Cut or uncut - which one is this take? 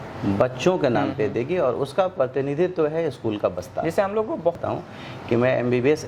cut